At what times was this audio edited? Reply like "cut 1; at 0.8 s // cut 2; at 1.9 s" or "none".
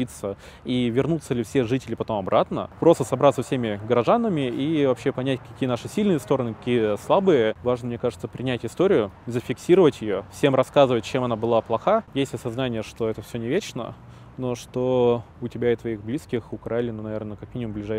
cut 1; at 2.6 s // cut 2; at 7.6 s // cut 3; at 12.1 s